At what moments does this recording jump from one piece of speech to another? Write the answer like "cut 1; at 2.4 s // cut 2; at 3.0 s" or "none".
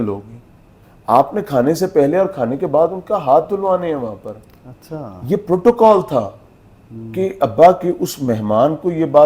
none